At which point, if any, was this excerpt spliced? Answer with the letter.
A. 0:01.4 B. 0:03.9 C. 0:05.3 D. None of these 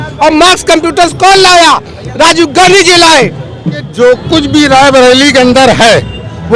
B